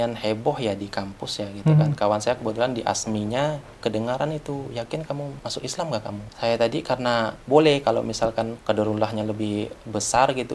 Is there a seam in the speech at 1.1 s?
no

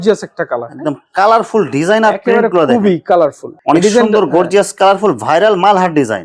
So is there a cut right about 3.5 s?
yes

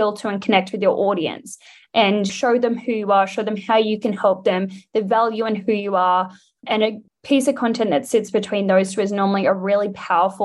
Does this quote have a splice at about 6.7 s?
yes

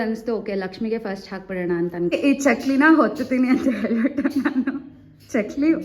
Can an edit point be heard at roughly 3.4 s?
no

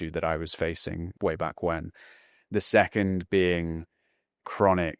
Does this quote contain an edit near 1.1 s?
yes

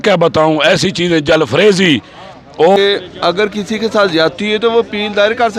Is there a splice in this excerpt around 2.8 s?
yes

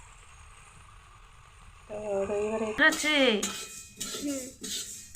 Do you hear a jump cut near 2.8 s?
yes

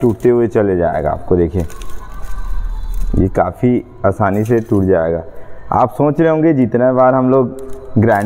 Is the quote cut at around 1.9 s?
no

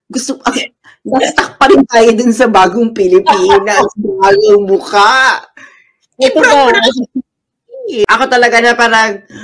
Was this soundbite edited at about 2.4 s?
no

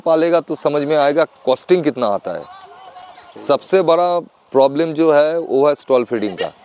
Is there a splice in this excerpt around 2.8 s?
no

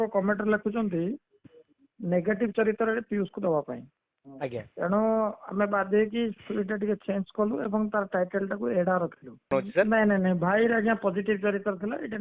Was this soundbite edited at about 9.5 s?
yes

